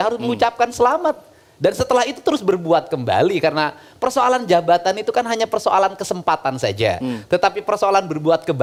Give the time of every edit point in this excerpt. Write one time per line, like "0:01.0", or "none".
none